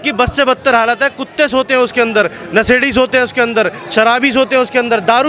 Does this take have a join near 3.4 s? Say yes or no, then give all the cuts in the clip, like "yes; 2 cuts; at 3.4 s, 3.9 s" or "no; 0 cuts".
no; 0 cuts